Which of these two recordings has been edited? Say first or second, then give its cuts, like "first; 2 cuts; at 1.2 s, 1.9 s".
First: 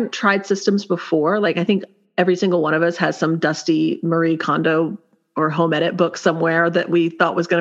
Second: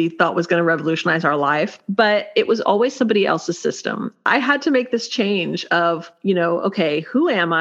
second; 3 cuts; at 1.8 s, 4.2 s, 6.1 s